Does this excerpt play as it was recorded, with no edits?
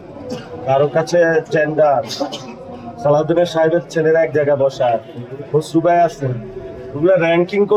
yes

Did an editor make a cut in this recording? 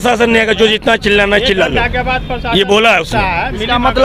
no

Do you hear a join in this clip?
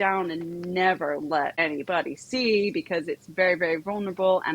yes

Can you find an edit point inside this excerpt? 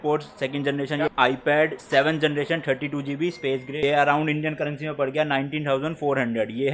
yes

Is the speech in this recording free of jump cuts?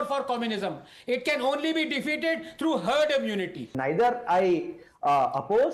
no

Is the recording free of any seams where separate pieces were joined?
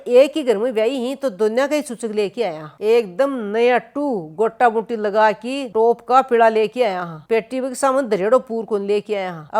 no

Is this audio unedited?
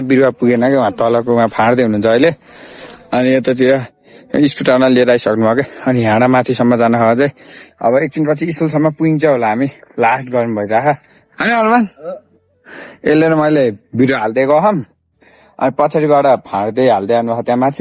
yes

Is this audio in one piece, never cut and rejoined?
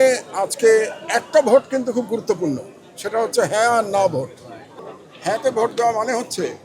no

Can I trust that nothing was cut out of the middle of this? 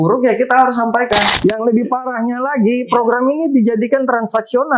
no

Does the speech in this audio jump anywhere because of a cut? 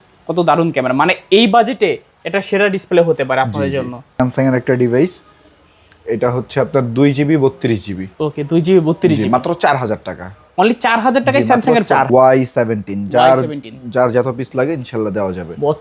yes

